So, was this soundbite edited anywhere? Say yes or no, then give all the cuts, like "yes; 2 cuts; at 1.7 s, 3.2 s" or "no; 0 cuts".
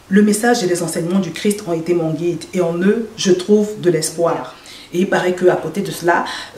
yes; 1 cut; at 4.5 s